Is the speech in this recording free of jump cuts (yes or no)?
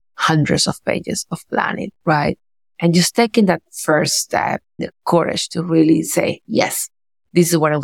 no